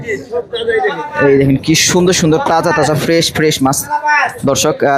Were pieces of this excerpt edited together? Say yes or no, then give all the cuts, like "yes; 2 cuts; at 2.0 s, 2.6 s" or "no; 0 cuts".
no; 0 cuts